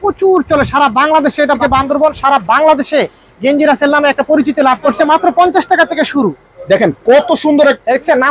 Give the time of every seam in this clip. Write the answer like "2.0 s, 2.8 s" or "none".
1.6 s, 4.9 s